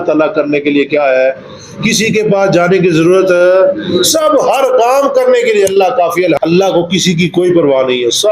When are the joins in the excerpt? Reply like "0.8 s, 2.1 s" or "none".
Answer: 6.4 s